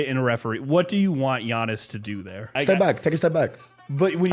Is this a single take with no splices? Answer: no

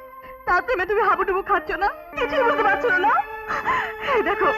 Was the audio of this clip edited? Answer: yes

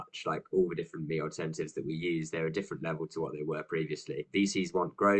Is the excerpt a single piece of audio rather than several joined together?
no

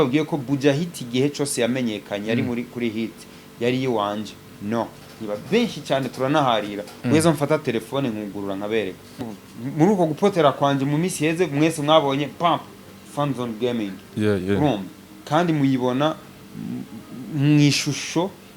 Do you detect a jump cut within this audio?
yes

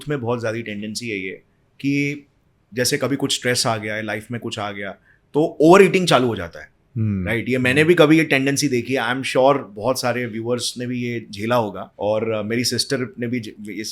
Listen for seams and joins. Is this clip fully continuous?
no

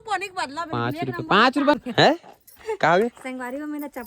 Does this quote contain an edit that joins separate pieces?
yes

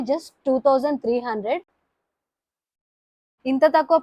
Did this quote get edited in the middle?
no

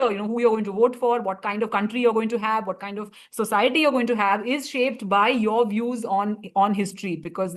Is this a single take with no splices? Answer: yes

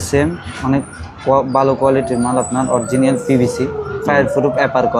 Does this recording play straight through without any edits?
yes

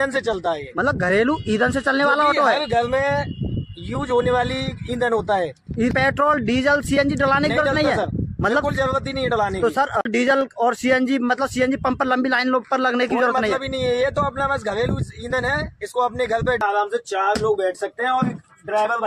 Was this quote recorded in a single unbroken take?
no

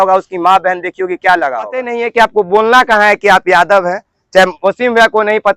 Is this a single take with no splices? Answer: no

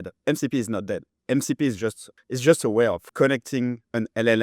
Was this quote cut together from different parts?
yes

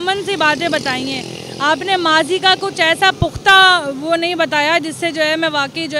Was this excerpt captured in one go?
yes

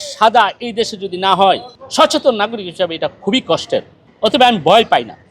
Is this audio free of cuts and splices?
no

